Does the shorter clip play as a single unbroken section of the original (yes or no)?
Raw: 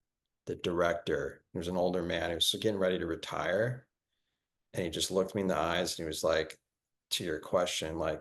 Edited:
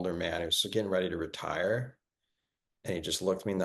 yes